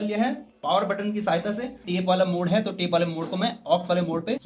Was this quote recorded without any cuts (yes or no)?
no